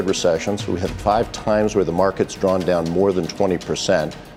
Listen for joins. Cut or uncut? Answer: uncut